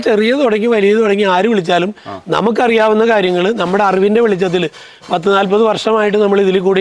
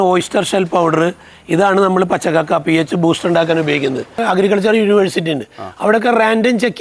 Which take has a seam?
second; 1 cut; at 4.2 s

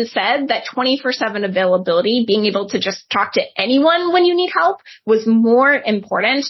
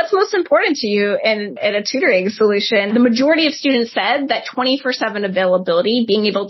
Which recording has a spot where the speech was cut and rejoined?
second; 1 cut; at 2.9 s

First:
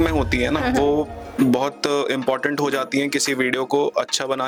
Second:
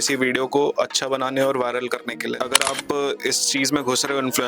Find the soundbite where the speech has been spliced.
second; 1 cut; at 2.4 s

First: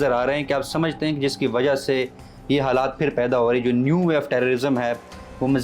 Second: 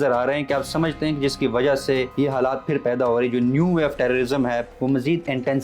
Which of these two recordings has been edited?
second; 2 cuts; at 2.1 s, 4.7 s

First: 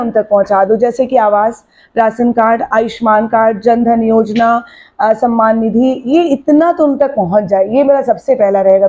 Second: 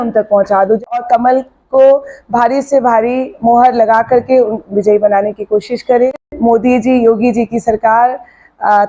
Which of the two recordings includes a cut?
second; 2 cuts; at 1.0 s, 6.3 s

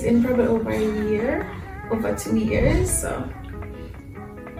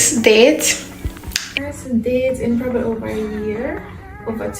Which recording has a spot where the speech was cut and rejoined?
second; 1 cut; at 1.4 s

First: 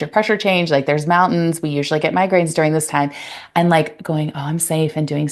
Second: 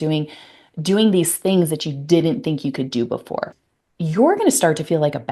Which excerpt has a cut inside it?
second; 1 cut; at 3.4 s

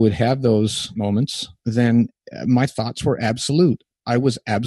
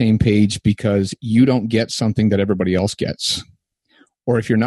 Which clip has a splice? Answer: first; 1 cut; at 1.1 s

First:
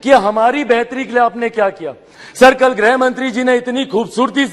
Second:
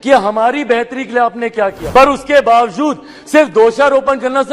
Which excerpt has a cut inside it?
second; 1 cut; at 1.8 s

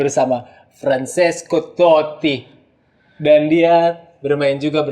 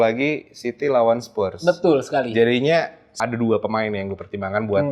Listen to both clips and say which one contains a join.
second; 1 cut; at 3.1 s

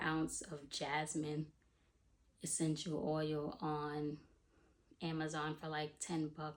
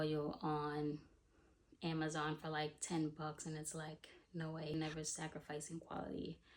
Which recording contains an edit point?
second; 1 cut; at 4.7 s

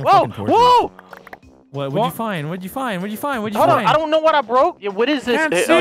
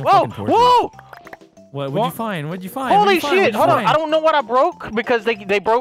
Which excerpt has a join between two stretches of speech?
first; 1 cut; at 4.8 s

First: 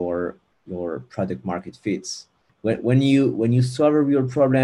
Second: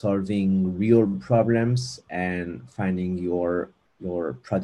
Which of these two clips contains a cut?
first; 1 cut; at 2.4 s

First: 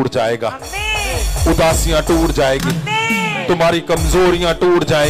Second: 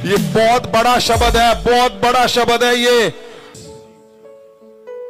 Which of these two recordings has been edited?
second; 1 cut; at 3.3 s

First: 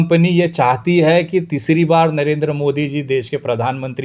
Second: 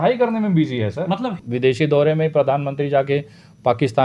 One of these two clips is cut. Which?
second; 1 cut; at 1.3 s

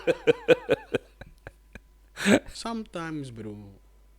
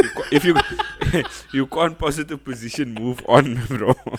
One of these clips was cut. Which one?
first; 1 cut; at 2.5 s

